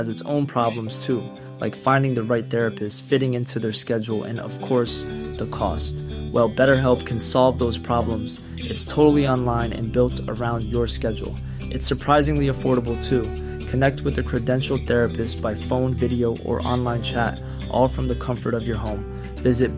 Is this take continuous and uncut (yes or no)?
yes